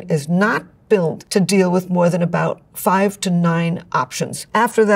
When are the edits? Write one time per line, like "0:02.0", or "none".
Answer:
0:01.2

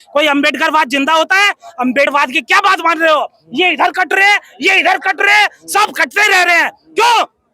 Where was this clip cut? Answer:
0:02.1

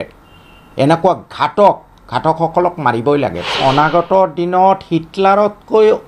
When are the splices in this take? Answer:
0:03.4

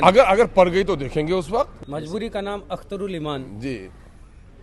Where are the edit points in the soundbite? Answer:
0:01.8

